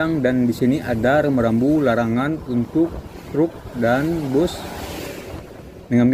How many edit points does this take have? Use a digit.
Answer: 0